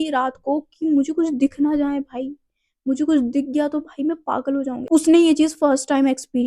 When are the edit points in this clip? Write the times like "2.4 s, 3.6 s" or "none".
4.8 s